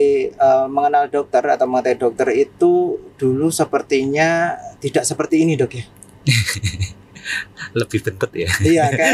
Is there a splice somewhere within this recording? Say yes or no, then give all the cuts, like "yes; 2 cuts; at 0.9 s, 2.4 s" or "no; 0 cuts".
no; 0 cuts